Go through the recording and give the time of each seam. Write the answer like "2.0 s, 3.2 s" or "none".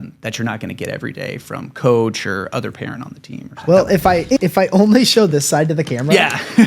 3.5 s